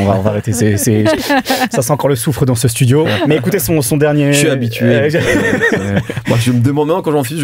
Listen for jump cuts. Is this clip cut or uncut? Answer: uncut